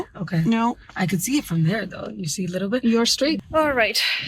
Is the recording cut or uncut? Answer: cut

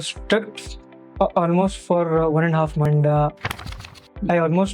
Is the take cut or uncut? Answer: uncut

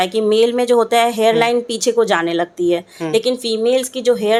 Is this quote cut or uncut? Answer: uncut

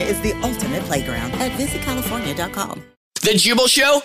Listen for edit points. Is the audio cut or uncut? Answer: cut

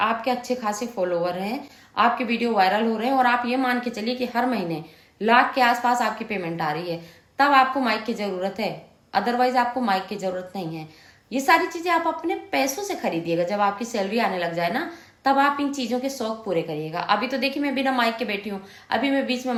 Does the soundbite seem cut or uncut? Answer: uncut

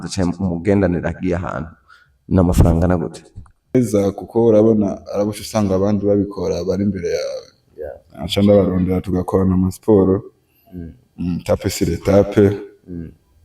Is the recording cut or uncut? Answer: cut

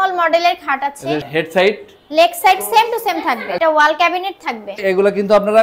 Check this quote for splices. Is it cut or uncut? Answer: cut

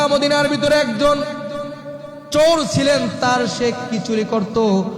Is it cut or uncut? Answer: uncut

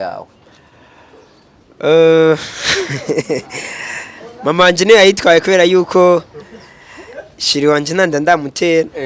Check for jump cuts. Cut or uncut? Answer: uncut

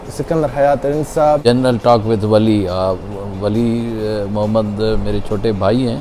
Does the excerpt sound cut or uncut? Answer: cut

